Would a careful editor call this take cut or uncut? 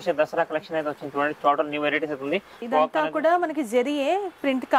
cut